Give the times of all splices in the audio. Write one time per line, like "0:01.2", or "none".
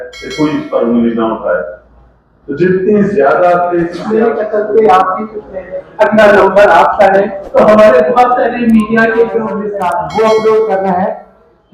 0:04.0
0:09.6